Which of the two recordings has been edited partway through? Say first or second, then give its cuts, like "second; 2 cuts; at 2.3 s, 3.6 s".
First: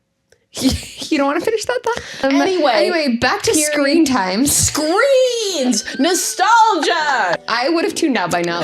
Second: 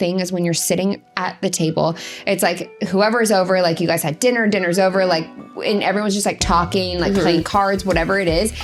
first; 2 cuts; at 2.2 s, 7.5 s